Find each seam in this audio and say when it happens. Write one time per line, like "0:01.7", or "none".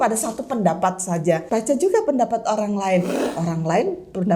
0:01.4
0:03.2